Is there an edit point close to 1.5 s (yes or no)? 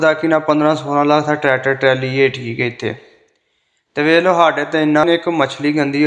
no